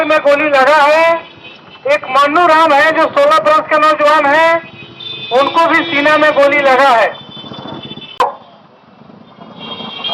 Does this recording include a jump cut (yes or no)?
yes